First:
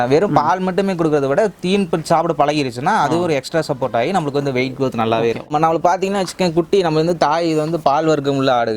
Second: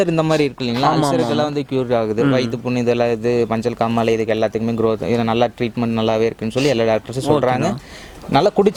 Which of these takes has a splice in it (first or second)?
first